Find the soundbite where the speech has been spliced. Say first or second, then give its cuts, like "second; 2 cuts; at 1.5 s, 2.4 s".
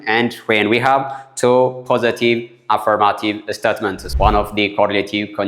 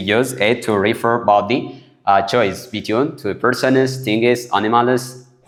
first; 1 cut; at 4.0 s